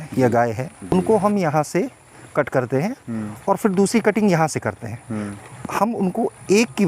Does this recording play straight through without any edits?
no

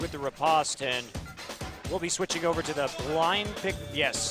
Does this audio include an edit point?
no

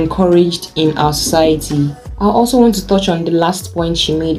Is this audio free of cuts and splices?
yes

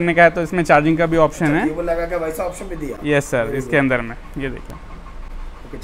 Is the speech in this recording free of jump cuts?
yes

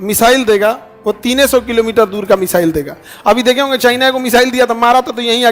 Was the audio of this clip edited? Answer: no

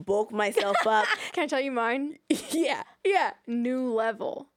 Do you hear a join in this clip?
yes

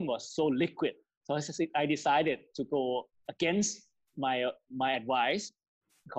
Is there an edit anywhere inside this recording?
no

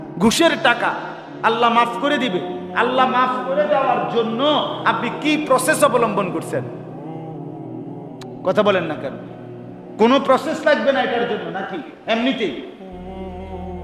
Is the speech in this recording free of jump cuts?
no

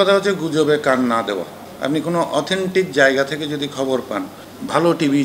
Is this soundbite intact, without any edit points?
yes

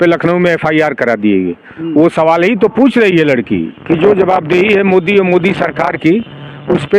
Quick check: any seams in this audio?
no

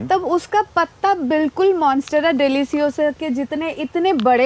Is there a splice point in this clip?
no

